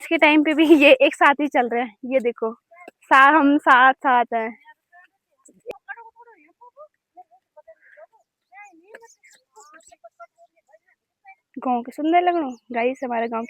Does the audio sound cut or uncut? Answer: cut